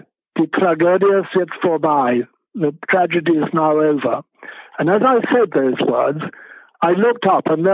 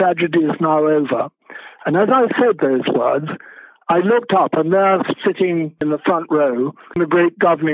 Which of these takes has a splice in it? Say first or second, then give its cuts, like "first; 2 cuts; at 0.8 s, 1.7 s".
second; 2 cuts; at 5.8 s, 6.9 s